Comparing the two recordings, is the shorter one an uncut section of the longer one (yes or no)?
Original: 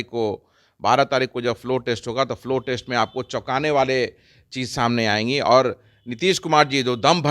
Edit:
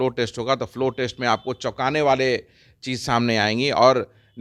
yes